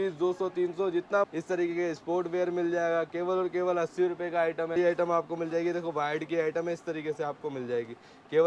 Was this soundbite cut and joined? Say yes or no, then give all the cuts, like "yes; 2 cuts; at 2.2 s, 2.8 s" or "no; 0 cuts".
yes; 2 cuts; at 1.3 s, 4.7 s